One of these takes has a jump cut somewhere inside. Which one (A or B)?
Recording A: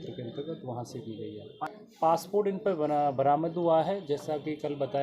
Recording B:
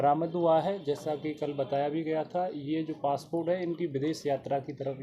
A